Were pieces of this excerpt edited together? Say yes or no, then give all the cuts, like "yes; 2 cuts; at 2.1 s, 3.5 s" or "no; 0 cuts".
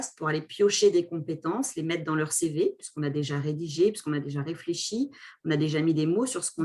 no; 0 cuts